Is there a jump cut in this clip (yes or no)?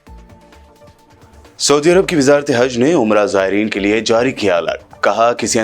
yes